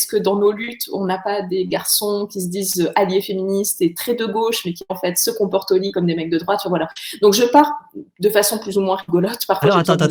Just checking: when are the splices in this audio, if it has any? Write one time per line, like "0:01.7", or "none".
none